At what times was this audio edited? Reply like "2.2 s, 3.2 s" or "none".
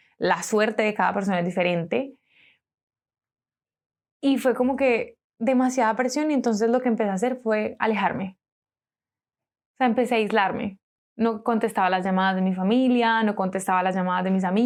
none

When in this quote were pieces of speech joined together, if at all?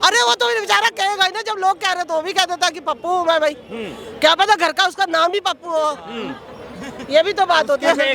none

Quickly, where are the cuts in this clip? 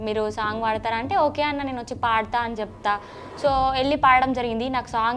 none

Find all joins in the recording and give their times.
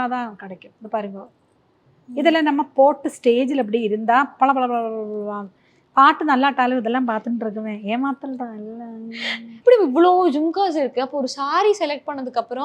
none

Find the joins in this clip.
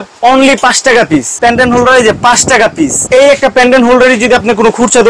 1.3 s, 3.0 s

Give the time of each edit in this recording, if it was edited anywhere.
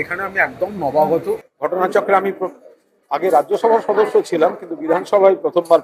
1.5 s

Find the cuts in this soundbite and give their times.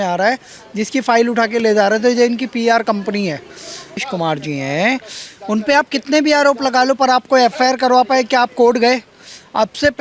4.0 s

